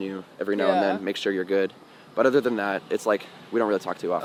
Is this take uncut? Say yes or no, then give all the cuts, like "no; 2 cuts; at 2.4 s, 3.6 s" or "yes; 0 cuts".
yes; 0 cuts